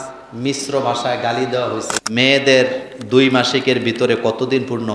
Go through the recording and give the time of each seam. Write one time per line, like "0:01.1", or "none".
0:02.0